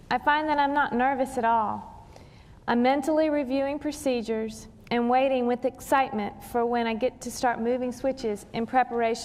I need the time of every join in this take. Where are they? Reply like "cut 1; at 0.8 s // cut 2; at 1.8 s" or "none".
cut 1; at 1.6 s